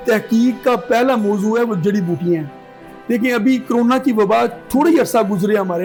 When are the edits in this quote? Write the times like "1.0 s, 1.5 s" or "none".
none